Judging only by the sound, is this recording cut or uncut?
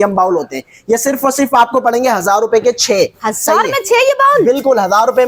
uncut